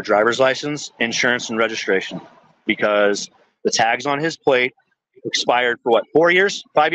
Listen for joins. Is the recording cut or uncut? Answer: uncut